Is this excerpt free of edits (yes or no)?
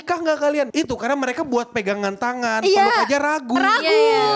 yes